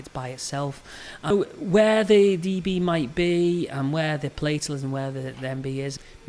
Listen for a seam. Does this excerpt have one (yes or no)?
yes